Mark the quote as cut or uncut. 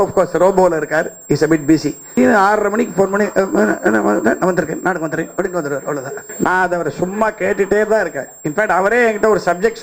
cut